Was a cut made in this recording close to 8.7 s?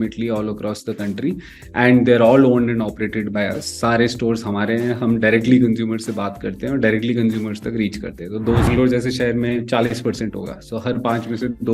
yes; 1 cut; at 8.7 s

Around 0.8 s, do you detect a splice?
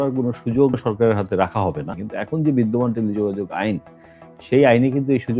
yes; 2 cuts; at 0.8 s, 1.9 s

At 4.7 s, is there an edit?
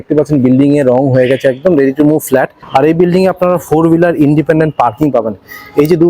no; 1 cut; at 2.6 s

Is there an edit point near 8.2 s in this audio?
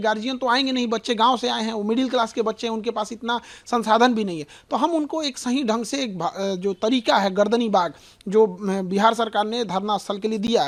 no; 0 cuts

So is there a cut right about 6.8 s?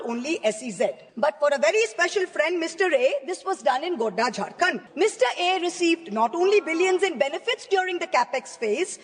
no; 2 cuts; at 1.0 s, 4.8 s

